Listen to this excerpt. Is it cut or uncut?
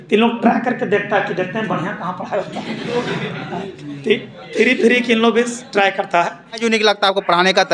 cut